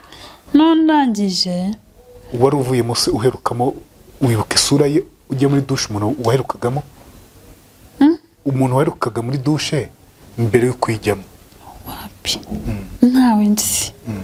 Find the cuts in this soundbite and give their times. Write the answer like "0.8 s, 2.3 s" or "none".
none